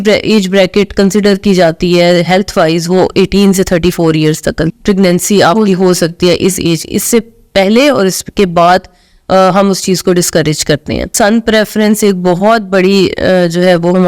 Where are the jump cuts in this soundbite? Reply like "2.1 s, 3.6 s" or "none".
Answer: 4.6 s, 11.1 s